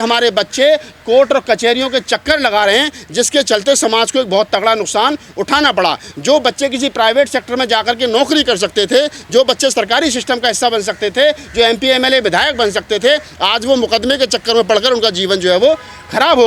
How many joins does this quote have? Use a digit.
0